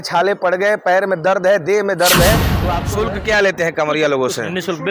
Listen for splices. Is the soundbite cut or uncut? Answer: cut